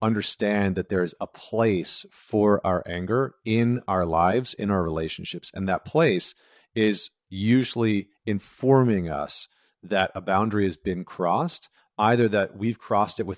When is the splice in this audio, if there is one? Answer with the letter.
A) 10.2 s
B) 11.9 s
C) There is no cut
C